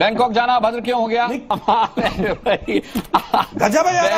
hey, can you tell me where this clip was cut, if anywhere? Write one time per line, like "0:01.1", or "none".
0:01.5